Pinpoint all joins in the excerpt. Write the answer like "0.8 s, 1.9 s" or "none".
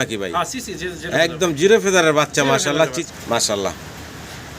3.0 s